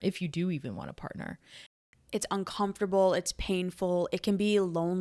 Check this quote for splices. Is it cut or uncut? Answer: cut